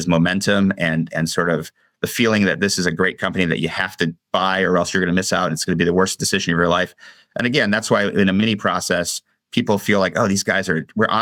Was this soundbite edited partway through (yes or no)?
no